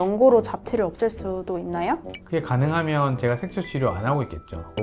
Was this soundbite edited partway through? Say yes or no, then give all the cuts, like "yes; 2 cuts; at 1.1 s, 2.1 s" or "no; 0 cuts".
no; 0 cuts